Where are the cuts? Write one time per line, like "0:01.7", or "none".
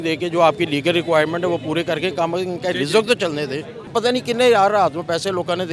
0:03.9